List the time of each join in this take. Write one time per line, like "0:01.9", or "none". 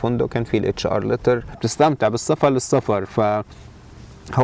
0:01.7